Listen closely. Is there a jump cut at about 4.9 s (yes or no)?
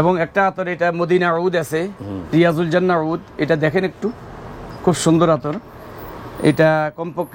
no